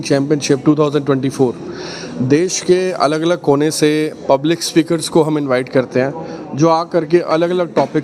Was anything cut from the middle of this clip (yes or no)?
no